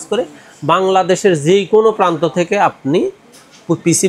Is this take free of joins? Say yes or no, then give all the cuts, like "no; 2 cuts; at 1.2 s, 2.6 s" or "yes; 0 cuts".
yes; 0 cuts